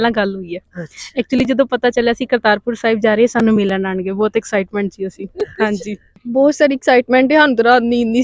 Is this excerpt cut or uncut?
cut